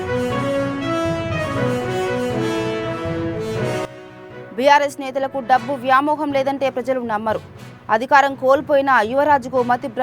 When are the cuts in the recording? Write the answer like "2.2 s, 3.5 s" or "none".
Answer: 4.1 s